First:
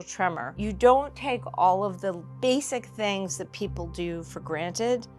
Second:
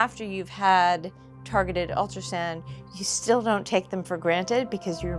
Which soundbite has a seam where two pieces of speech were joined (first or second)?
first